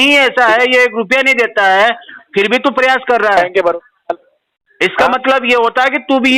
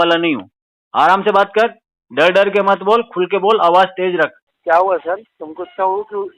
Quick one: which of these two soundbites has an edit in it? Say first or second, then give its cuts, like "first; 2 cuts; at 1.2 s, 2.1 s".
second; 1 cut; at 4.5 s